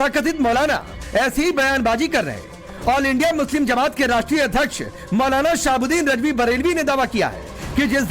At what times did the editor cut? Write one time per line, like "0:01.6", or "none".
0:06.0